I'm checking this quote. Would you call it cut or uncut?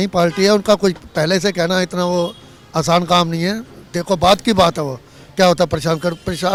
uncut